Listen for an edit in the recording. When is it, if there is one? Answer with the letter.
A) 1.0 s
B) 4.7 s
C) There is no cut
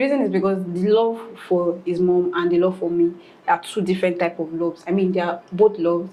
C